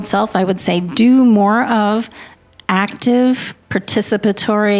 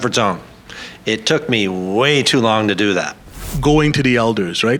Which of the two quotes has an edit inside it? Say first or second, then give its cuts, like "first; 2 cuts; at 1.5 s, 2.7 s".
second; 1 cut; at 3.4 s